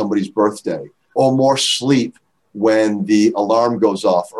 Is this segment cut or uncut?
cut